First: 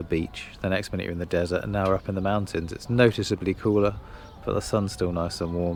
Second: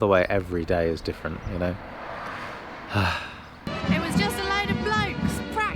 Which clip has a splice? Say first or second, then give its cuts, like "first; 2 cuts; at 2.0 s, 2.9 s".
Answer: second; 1 cut; at 3.5 s